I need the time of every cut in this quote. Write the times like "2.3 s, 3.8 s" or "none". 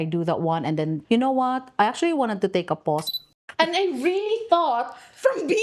1.0 s, 3.1 s